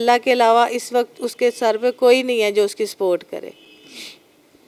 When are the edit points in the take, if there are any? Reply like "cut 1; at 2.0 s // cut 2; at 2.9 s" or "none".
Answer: none

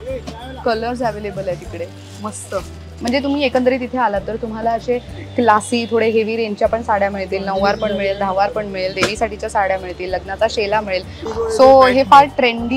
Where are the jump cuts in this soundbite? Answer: cut 1; at 3.0 s // cut 2; at 11.2 s

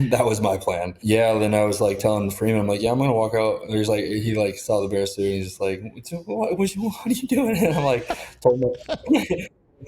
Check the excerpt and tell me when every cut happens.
cut 1; at 1.0 s

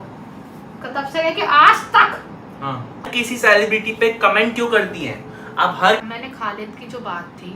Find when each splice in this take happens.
cut 1; at 3.1 s // cut 2; at 6.0 s

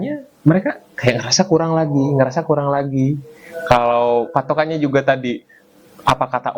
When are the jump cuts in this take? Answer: none

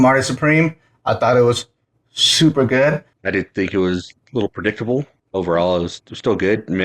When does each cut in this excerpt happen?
cut 1; at 3.1 s // cut 2; at 5.2 s

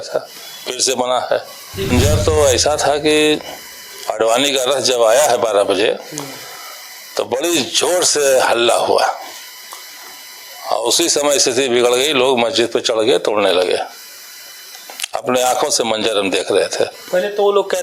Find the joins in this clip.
cut 1; at 1.9 s

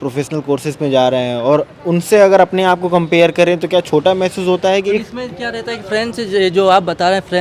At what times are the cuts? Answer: cut 1; at 4.6 s

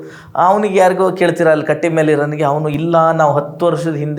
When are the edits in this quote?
none

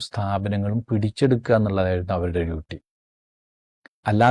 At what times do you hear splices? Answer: none

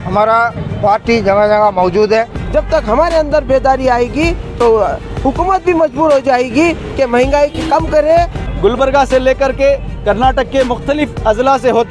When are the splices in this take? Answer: cut 1; at 2.4 s // cut 2; at 8.4 s

